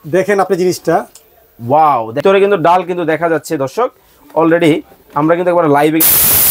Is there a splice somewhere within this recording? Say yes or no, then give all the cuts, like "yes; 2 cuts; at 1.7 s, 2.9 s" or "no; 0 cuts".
yes; 1 cut; at 2.2 s